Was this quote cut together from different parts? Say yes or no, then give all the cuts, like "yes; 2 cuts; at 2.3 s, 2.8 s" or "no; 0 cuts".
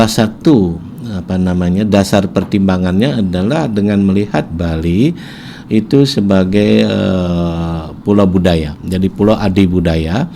no; 0 cuts